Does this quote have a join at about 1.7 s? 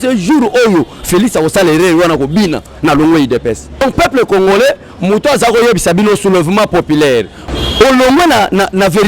no; 2 cuts; at 3.8 s, 7.4 s

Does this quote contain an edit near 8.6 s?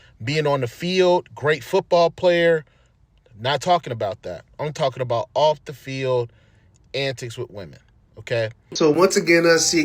yes; 1 cut; at 8.6 s

